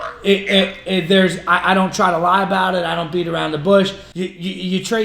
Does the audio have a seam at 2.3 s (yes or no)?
no